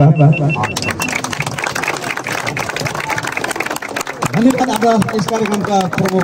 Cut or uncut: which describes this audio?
uncut